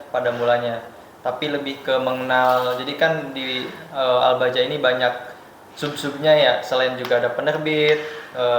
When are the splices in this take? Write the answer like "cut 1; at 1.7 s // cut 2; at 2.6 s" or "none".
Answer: none